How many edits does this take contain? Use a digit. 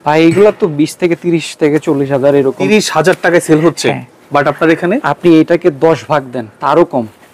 1